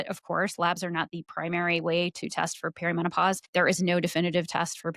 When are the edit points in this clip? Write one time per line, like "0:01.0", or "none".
0:03.4